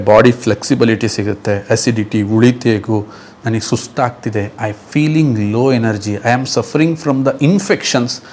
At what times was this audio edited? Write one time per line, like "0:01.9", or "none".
none